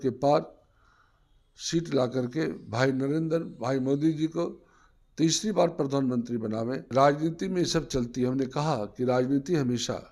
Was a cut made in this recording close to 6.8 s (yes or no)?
yes